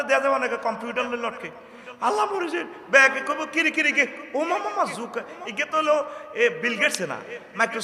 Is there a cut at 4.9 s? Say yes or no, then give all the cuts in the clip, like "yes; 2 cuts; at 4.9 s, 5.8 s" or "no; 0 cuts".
no; 0 cuts